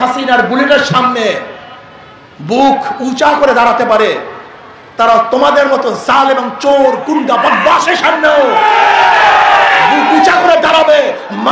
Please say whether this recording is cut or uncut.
uncut